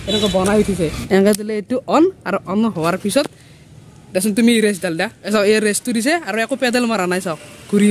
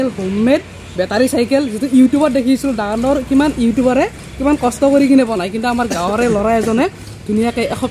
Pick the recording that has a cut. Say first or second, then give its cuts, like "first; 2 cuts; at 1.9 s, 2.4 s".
first; 2 cuts; at 1.0 s, 5.2 s